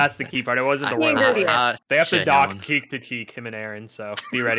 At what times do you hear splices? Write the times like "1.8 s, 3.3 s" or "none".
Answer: 1.8 s